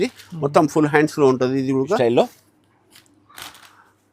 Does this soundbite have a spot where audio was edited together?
yes; 1 cut; at 2.0 s

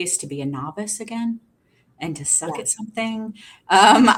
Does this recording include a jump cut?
no; 0 cuts

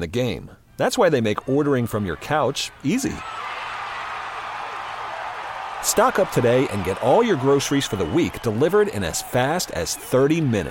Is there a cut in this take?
no; 0 cuts

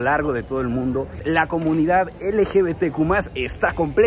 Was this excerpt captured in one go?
no; 1 cut; at 1.2 s

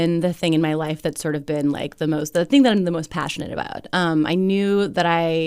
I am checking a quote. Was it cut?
no; 0 cuts

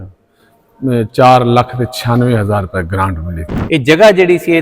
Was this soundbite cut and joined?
yes; 1 cut; at 3.5 s

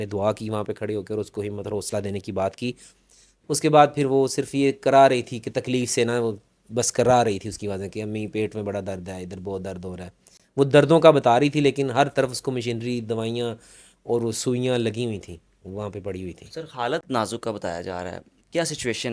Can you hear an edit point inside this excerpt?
no; 0 cuts

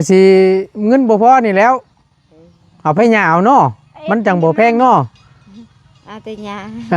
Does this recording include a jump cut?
no; 0 cuts

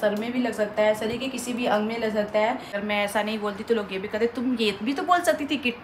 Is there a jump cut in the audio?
yes; 1 cut; at 2.8 s

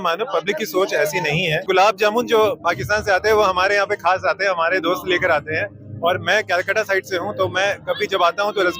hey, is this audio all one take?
no; 1 cut; at 1.6 s

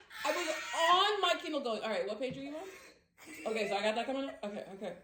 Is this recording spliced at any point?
no; 0 cuts

